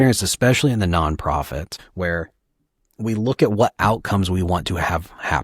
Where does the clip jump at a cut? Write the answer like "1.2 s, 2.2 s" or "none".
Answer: 1.8 s